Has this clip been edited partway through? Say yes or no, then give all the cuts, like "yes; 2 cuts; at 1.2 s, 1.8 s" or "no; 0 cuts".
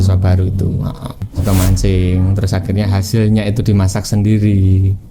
yes; 1 cut; at 1.2 s